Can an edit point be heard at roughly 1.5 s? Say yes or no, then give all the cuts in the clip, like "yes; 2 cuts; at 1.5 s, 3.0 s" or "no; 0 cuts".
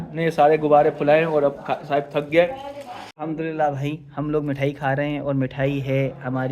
no; 1 cut; at 3.1 s